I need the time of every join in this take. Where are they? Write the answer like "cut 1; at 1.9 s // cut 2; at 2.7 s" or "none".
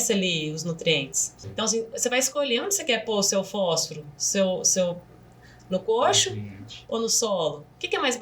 cut 1; at 1.3 s